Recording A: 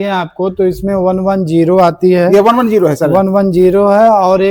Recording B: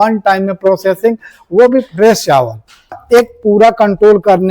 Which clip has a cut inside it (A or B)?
B